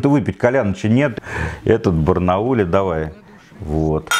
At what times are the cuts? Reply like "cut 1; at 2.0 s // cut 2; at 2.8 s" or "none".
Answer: cut 1; at 1.1 s